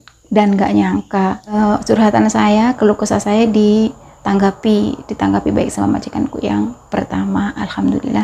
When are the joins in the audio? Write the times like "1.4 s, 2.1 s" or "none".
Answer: 1.5 s